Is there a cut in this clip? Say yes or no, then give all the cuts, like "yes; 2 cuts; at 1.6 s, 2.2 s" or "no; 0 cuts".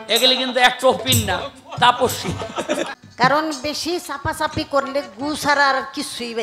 yes; 1 cut; at 2.9 s